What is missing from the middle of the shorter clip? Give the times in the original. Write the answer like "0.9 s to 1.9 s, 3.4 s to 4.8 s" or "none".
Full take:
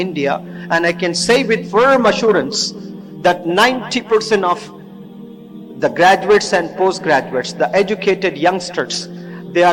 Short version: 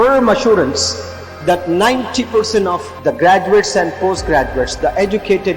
4.7 s to 5.7 s